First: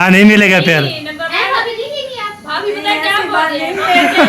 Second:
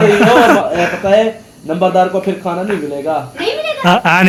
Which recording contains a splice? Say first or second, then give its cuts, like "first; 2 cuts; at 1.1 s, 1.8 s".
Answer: first; 1 cut; at 1.7 s